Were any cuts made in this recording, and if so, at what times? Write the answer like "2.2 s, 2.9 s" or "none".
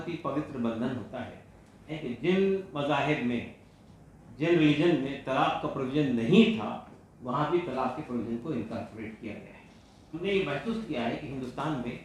1.9 s, 10.2 s